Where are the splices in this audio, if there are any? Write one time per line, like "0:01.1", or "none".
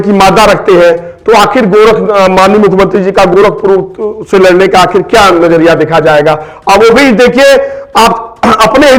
none